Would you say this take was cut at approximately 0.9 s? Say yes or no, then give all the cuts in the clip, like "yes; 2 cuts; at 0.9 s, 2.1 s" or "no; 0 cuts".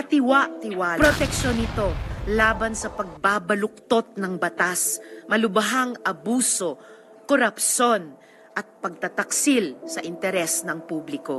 yes; 1 cut; at 0.9 s